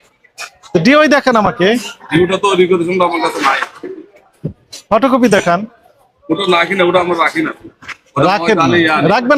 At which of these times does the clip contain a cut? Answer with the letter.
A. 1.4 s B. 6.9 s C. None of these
C